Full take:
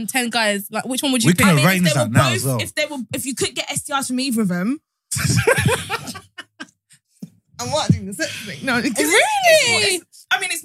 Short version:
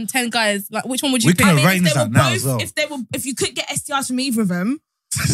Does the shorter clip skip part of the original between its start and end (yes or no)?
no